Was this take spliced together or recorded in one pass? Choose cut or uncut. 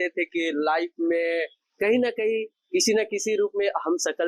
uncut